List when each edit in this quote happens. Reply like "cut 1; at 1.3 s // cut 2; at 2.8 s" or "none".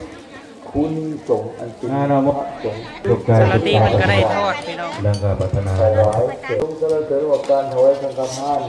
cut 1; at 3.0 s // cut 2; at 6.6 s